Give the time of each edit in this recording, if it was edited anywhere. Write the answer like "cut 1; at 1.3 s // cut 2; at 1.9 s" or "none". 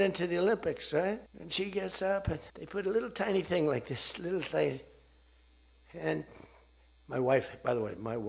cut 1; at 1.4 s // cut 2; at 2.5 s